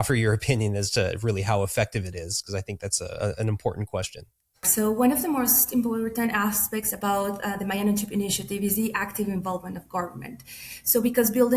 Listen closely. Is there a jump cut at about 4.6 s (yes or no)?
yes